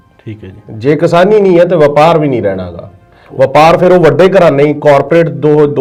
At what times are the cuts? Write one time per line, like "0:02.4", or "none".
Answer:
none